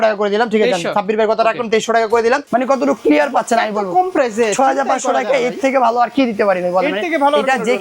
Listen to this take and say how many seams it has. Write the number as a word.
one